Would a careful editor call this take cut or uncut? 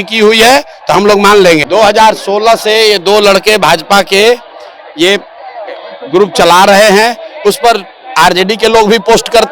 cut